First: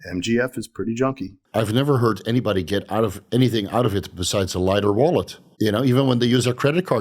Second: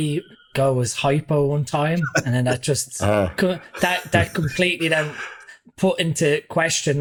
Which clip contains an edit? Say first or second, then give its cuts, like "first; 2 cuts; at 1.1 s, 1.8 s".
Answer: first; 2 cuts; at 1.3 s, 5.4 s